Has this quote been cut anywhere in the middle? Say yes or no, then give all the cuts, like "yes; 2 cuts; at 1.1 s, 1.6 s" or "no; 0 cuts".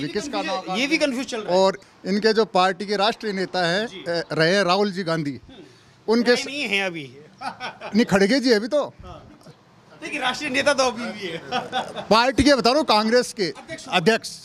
no; 0 cuts